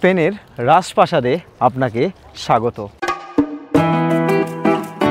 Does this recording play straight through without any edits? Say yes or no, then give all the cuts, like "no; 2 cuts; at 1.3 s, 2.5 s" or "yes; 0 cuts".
no; 1 cut; at 2.9 s